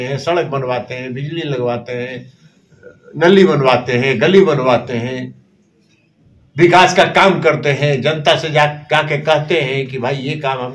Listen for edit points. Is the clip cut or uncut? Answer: uncut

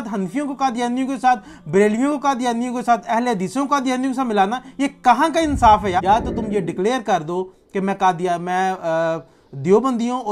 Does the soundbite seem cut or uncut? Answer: cut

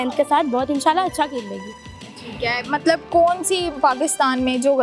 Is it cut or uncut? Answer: uncut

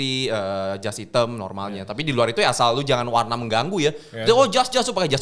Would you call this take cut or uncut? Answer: uncut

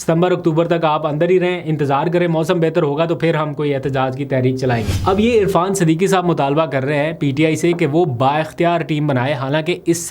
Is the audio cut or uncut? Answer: cut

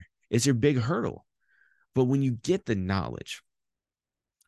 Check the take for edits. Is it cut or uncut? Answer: uncut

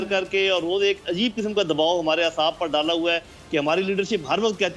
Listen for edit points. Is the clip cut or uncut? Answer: uncut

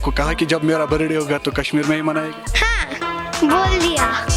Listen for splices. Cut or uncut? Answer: uncut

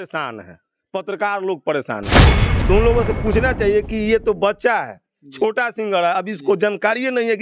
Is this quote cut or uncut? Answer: cut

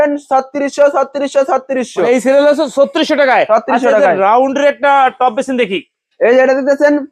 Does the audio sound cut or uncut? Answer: uncut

